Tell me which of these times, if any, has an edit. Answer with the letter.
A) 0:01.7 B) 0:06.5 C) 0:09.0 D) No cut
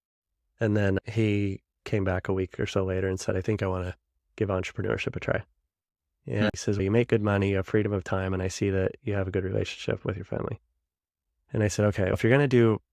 B